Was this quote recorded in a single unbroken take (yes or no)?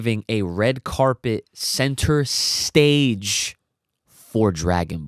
yes